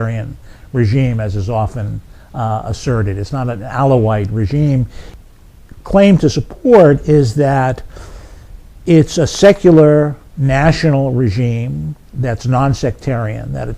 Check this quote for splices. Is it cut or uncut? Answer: cut